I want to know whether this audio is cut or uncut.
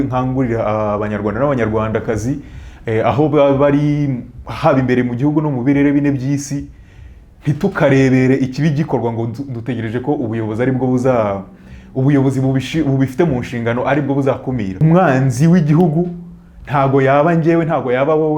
cut